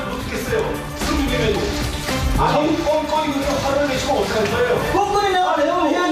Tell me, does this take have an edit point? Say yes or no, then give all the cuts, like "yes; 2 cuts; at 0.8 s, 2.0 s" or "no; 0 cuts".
yes; 1 cut; at 3.1 s